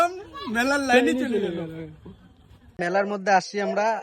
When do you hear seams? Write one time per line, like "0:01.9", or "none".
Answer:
0:02.7